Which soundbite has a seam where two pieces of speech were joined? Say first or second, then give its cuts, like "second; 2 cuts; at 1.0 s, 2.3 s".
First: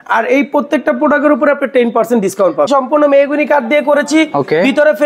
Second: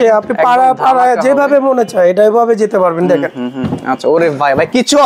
first; 1 cut; at 2.7 s